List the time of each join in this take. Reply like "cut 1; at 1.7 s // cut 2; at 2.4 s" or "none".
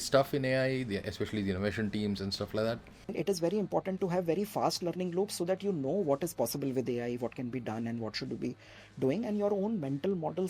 cut 1; at 3.1 s